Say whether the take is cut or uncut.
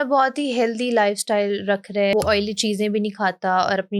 cut